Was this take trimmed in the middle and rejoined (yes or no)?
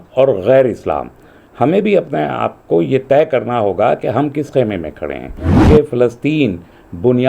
yes